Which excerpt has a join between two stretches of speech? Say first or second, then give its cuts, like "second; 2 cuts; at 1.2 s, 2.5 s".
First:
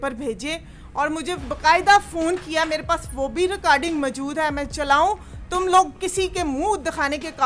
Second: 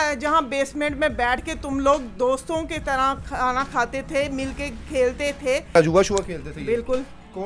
second; 1 cut; at 5.8 s